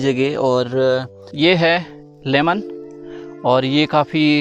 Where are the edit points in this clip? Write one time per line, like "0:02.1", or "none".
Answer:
0:01.2